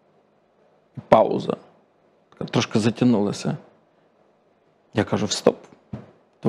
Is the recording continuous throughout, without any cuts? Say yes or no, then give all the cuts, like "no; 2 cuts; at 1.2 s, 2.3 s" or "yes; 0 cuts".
yes; 0 cuts